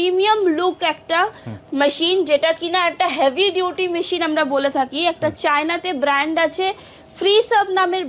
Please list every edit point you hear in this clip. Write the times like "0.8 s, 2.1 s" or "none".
none